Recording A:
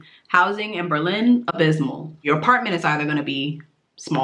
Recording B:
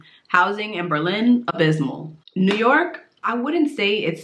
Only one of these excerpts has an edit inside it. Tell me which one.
A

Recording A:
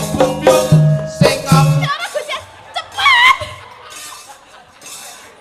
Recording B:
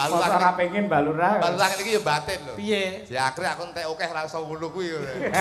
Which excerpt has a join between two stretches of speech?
A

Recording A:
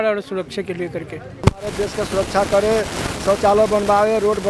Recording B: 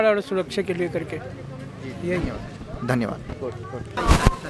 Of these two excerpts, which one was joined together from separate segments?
A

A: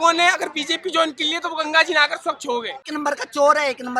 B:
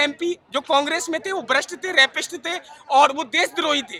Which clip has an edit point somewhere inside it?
A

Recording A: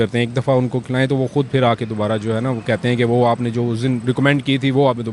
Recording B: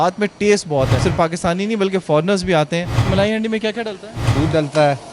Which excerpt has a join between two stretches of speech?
B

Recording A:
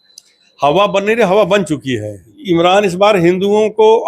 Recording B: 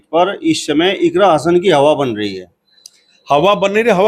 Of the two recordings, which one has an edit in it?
A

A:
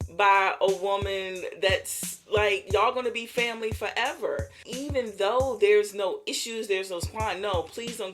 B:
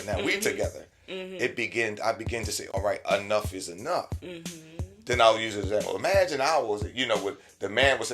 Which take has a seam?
B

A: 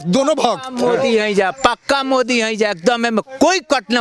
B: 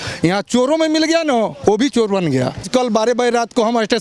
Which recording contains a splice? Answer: B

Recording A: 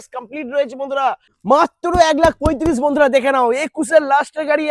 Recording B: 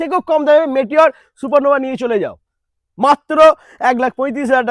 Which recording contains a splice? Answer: A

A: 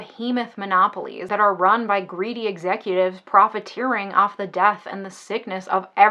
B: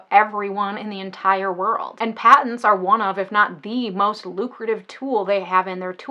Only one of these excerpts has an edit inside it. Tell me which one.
A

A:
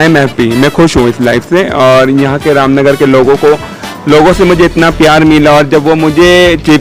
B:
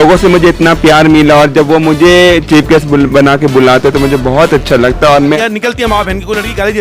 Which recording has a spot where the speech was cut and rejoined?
B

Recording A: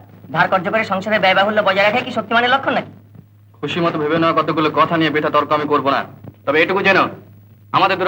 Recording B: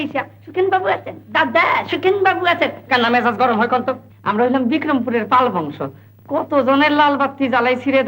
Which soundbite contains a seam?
B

